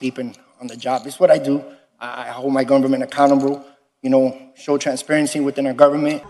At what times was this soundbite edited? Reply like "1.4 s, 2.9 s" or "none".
none